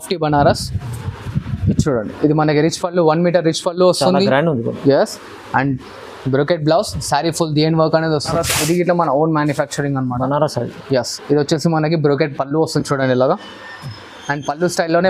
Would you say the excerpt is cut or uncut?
cut